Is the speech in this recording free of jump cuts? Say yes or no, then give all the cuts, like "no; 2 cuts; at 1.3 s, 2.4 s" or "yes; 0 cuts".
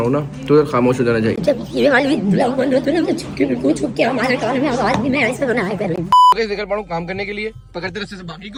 yes; 0 cuts